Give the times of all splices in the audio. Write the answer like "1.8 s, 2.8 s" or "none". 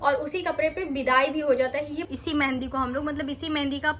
2.1 s